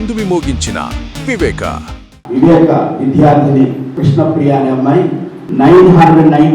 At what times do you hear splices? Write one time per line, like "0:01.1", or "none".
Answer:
none